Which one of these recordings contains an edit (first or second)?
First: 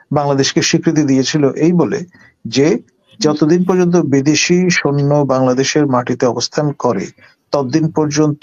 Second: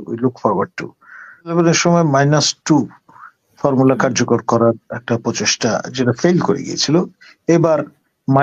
second